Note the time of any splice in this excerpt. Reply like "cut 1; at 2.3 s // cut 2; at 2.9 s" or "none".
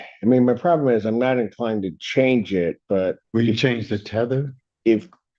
cut 1; at 3.2 s